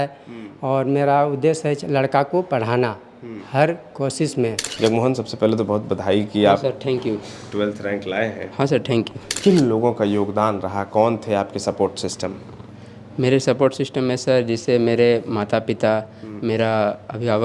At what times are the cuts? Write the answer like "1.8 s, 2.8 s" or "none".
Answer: 4.6 s, 9.3 s